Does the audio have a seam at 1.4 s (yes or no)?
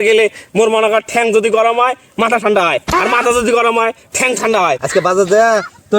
no